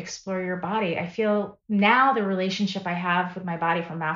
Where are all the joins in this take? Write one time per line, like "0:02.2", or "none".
0:01.6